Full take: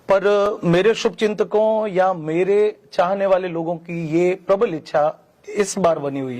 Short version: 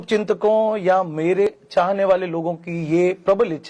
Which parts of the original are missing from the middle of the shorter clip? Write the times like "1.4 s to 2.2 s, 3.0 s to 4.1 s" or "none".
2.6 s to 2.7 s